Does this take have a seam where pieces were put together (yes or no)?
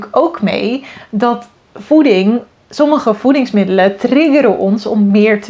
no